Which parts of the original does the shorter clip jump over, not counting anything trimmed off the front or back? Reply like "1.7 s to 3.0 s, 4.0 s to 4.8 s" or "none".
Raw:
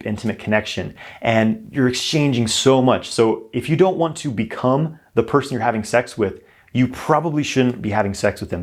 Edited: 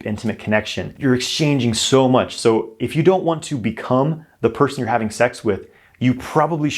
0.9 s to 1.7 s